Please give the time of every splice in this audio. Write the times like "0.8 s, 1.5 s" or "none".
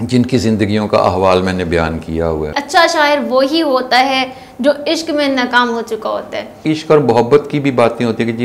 2.5 s, 6.6 s